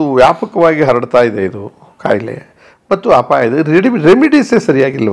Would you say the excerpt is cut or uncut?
uncut